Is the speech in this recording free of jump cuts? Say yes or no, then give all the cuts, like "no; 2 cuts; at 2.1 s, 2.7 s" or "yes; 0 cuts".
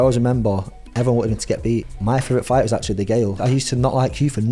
no; 2 cuts; at 1.9 s, 3.4 s